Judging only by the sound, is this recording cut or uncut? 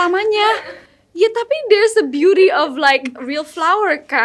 uncut